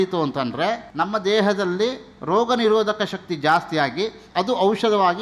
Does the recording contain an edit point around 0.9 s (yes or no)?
yes